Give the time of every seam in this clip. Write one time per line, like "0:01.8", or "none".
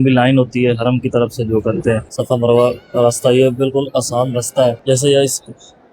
0:02.1
0:04.8